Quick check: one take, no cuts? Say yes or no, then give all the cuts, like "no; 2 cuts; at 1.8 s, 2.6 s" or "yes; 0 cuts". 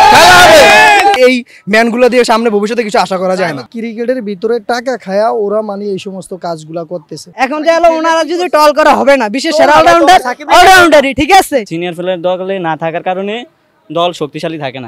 no; 4 cuts; at 1.2 s, 3.6 s, 7.3 s, 11.6 s